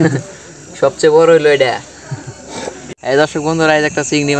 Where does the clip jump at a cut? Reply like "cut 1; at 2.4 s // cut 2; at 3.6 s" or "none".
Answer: cut 1; at 2.8 s